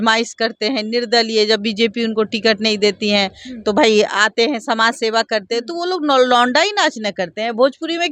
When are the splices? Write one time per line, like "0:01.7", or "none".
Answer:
none